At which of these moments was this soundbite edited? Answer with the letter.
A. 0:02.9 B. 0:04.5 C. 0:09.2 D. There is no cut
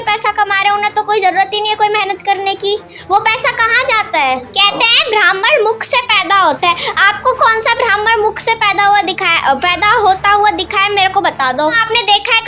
B